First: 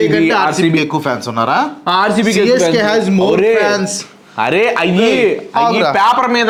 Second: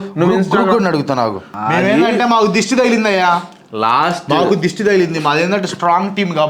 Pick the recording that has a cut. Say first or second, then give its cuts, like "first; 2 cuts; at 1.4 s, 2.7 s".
second; 1 cut; at 1.5 s